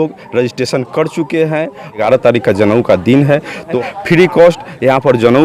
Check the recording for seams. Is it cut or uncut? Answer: cut